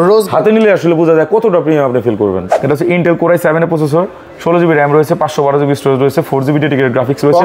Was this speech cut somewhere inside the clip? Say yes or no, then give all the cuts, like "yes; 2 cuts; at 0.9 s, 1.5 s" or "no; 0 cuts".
yes; 1 cut; at 2.5 s